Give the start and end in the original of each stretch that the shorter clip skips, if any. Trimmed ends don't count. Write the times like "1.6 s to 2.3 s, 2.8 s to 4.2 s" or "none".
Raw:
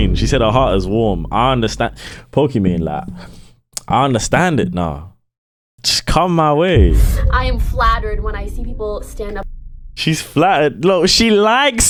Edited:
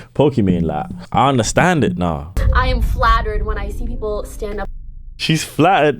3.1 s to 3.7 s, 5.1 s to 7.1 s